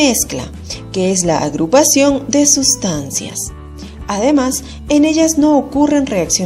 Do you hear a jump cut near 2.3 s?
yes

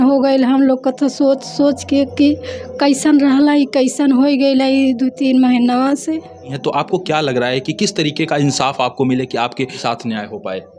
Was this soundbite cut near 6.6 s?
yes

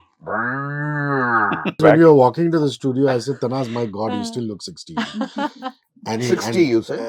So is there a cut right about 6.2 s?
no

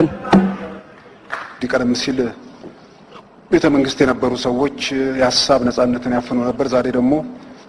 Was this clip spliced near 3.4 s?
no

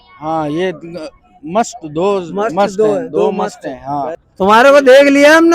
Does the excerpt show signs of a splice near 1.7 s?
no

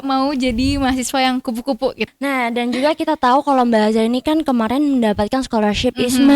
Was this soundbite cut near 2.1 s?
yes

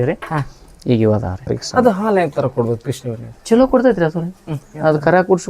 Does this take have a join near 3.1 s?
no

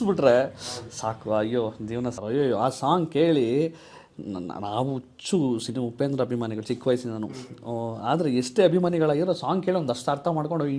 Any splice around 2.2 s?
yes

